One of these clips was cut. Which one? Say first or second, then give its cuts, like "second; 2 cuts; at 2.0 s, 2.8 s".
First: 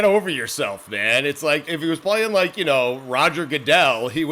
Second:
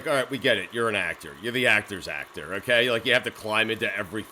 first; 1 cut; at 1.7 s